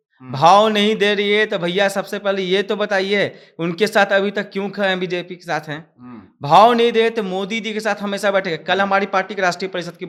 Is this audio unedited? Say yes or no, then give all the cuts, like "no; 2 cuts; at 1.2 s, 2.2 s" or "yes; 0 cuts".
yes; 0 cuts